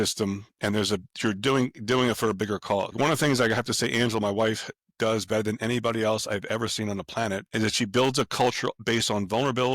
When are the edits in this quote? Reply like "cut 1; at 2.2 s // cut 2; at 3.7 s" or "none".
cut 1; at 2.9 s // cut 2; at 7.5 s // cut 3; at 8.7 s